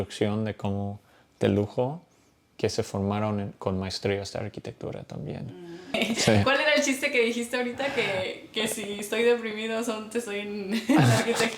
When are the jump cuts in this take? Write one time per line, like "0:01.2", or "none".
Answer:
0:06.0